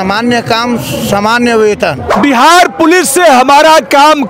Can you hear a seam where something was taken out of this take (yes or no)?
yes